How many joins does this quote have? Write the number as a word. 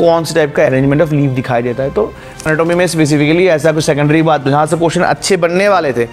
one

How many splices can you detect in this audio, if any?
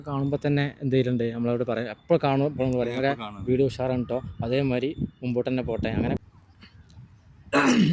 one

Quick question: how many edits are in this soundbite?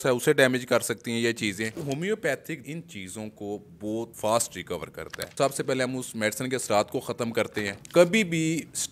five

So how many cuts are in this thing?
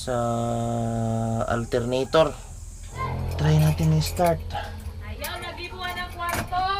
one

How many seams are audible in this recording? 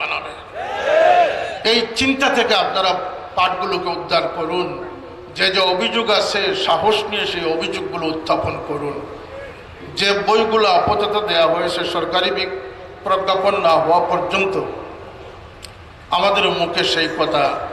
zero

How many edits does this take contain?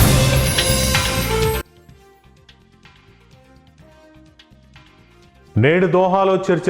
two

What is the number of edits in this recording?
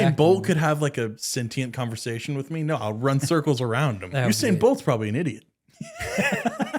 two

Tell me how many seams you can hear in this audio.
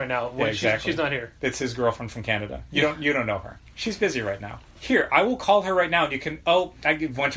one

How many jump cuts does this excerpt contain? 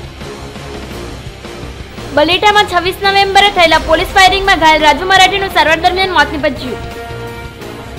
one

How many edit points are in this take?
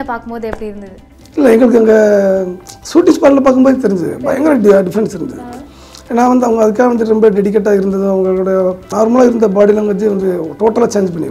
one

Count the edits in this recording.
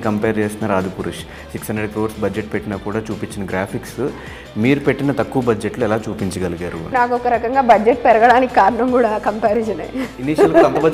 one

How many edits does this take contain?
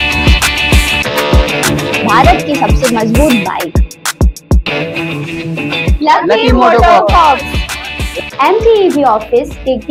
zero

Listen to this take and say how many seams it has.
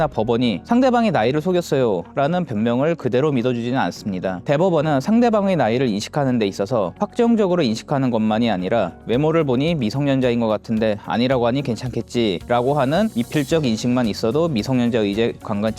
zero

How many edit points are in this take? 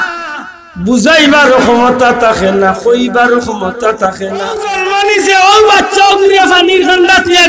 one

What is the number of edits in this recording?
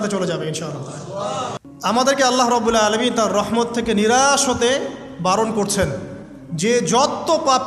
one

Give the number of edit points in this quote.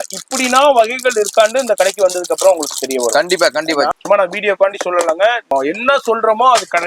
two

